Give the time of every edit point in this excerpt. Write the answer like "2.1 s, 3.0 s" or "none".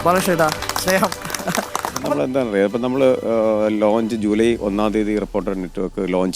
2.0 s